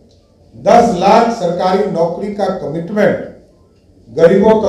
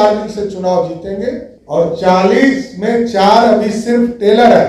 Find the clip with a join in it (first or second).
second